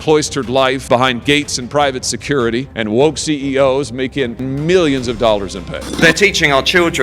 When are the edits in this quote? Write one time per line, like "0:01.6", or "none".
0:04.4
0:05.8